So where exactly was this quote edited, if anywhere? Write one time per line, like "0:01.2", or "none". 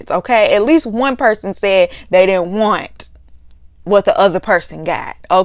none